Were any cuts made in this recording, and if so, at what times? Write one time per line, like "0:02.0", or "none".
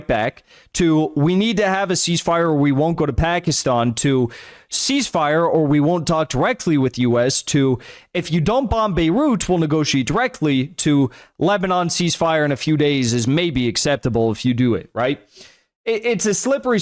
none

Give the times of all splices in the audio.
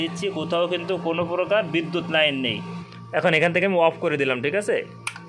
0:02.8

